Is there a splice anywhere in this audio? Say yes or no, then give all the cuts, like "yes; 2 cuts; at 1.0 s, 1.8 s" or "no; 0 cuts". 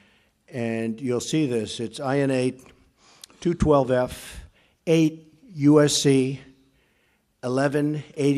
yes; 1 cut; at 6.2 s